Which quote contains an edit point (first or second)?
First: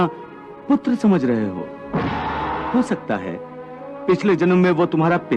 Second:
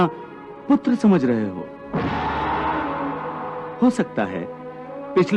first